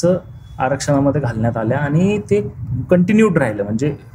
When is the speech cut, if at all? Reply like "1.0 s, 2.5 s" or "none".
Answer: none